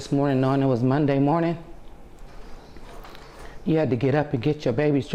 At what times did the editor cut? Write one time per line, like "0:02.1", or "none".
none